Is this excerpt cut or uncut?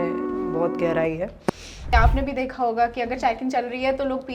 cut